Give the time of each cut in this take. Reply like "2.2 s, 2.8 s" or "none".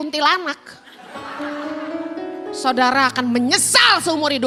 none